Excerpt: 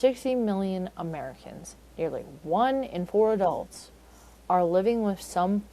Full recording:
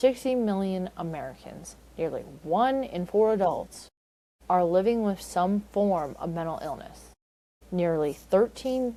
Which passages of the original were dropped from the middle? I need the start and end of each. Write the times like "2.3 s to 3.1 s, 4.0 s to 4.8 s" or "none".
none